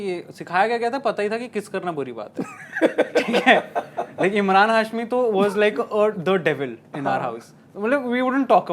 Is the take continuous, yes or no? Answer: yes